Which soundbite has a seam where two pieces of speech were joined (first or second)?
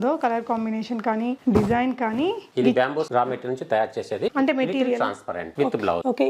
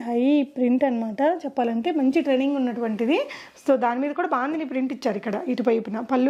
first